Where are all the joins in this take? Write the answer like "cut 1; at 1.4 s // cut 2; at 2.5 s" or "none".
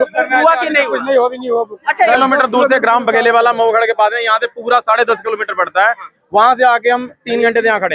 cut 1; at 2.1 s